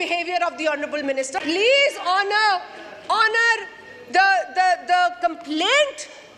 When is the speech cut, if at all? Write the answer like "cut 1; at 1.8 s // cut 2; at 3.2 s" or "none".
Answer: cut 1; at 1.4 s